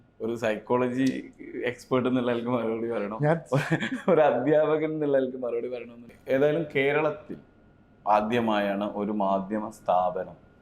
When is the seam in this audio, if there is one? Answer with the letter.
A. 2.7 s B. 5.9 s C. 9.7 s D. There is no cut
B